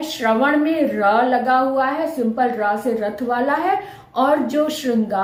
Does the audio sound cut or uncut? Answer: uncut